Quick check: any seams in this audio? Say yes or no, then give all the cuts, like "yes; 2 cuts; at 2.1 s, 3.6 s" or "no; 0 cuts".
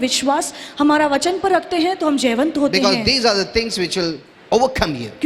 yes; 1 cut; at 4.3 s